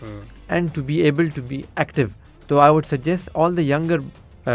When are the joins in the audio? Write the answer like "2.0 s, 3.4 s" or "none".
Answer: 2.3 s